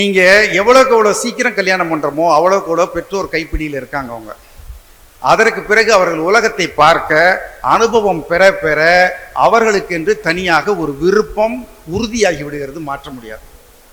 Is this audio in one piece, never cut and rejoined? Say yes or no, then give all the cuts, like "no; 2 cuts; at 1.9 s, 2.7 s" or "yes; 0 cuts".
yes; 0 cuts